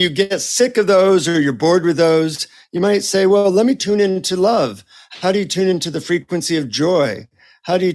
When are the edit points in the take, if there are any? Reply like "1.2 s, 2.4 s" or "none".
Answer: 3.8 s